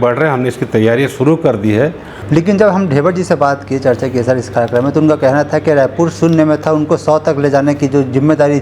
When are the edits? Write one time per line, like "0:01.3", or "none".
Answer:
0:02.1